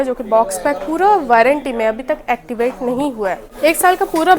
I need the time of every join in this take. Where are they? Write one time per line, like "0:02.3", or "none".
0:03.5